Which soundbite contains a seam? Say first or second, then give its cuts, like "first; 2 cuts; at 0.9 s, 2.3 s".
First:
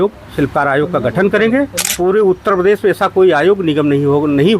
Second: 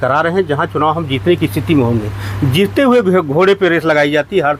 first; 1 cut; at 1.8 s